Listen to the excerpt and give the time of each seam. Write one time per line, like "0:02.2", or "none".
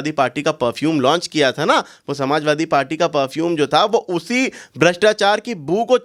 none